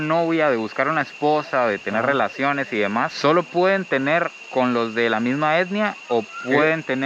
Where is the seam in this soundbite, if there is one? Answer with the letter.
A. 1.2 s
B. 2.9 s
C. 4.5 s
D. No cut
D